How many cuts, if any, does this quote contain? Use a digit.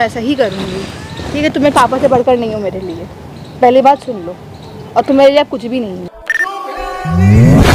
1